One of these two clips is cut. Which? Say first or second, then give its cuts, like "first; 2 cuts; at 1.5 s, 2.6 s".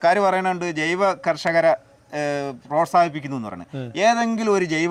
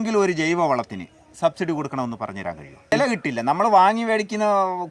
second; 1 cut; at 2.9 s